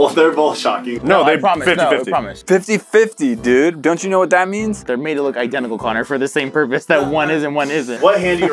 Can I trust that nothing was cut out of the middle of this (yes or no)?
yes